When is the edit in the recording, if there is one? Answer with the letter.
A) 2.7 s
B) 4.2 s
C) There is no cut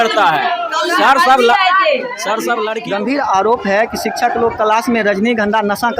A